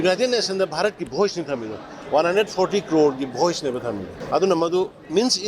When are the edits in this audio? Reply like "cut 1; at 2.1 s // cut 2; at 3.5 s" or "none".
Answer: cut 1; at 4.1 s